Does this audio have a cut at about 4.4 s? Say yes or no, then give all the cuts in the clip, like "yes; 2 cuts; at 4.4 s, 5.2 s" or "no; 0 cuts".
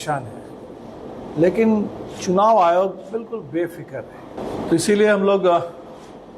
yes; 1 cut; at 4.4 s